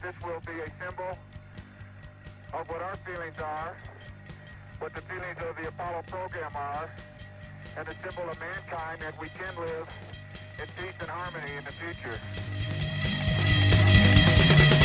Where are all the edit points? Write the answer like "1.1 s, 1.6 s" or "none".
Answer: none